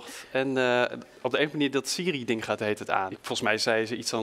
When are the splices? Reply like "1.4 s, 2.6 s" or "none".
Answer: 3.1 s